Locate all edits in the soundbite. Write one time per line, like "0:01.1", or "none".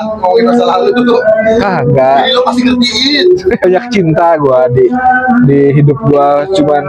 0:03.6